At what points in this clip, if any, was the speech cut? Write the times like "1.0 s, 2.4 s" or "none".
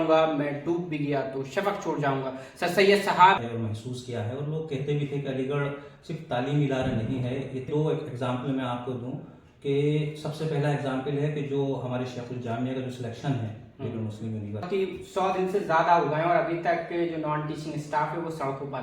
3.5 s, 7.7 s, 14.7 s